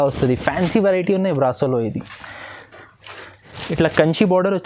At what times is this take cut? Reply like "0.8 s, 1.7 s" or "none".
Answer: 3.6 s